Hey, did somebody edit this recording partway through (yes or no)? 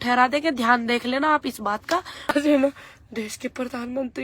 yes